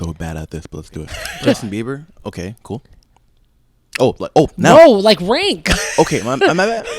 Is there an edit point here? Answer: yes; 1 cut; at 1.2 s

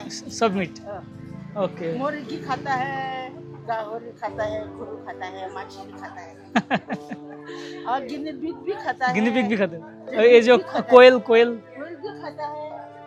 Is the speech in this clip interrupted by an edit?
no; 0 cuts

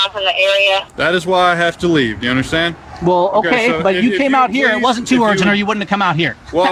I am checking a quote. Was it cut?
no; 0 cuts

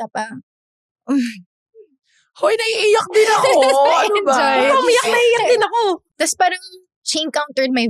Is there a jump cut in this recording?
yes; 1 cut; at 6.1 s

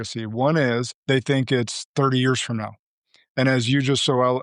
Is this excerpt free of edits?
no; 1 cut; at 0.9 s

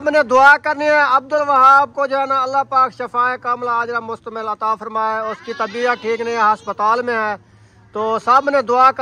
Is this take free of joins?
yes; 0 cuts

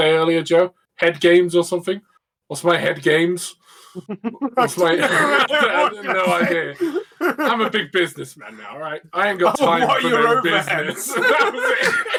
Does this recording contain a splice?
no; 0 cuts

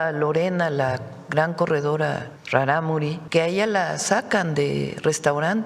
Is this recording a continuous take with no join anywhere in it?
no; 2 cuts; at 2.3 s, 3.2 s

